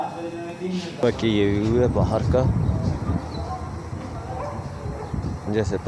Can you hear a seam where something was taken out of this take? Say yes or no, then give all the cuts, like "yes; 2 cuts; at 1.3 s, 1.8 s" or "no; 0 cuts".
yes; 1 cut; at 1.0 s